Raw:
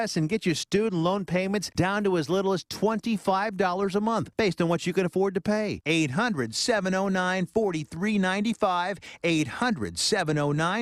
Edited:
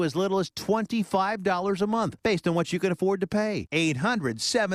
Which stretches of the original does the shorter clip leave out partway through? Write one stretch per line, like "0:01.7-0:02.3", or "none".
none